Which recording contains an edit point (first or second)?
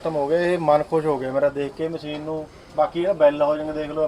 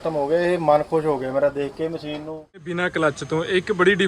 second